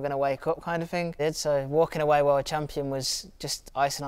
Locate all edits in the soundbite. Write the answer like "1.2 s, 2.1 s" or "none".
1.2 s